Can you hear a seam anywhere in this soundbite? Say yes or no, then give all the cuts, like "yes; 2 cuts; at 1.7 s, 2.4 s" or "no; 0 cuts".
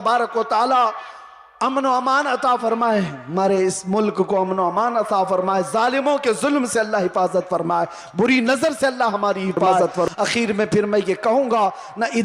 yes; 1 cut; at 10.1 s